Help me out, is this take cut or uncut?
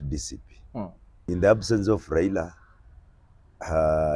cut